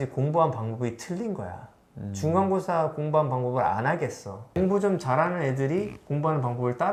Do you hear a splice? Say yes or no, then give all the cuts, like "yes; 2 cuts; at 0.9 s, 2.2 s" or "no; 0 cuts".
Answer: no; 0 cuts